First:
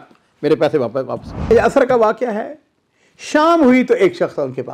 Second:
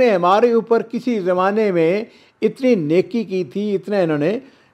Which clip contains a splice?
first; 1 cut; at 1.5 s

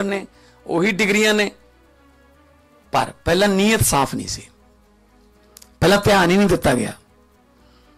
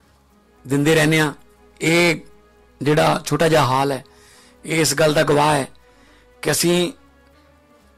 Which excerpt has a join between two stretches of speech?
first; 1 cut; at 7.0 s

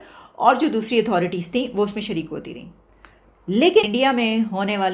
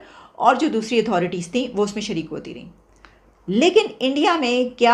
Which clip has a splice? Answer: first; 1 cut; at 3.9 s

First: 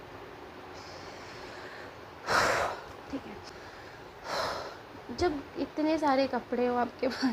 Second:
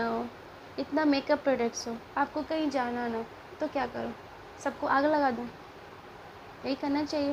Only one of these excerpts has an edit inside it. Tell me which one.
first; 1 cut; at 3.4 s

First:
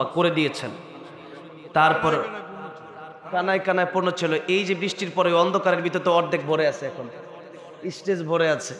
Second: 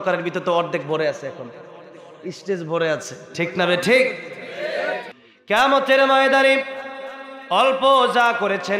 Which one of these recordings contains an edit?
second; 1 cut; at 5.1 s

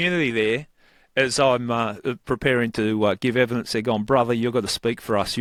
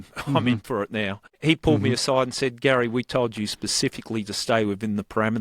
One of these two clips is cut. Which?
second; 1 cut; at 1.2 s

